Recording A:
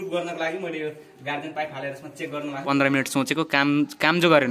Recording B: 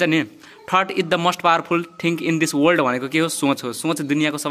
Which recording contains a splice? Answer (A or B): A